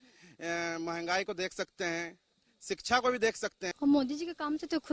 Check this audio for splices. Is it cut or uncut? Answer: cut